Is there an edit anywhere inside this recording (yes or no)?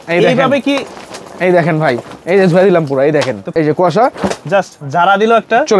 yes